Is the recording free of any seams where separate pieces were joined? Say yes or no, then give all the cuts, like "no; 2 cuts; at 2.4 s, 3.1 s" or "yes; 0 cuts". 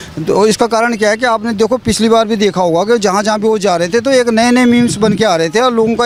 yes; 0 cuts